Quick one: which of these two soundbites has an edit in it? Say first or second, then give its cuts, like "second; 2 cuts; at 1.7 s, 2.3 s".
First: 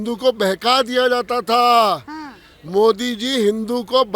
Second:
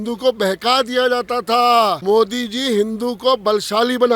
second; 1 cut; at 2.0 s